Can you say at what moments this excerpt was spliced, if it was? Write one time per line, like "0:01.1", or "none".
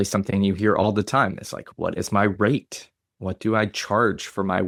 none